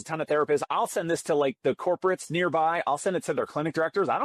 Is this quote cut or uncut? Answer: uncut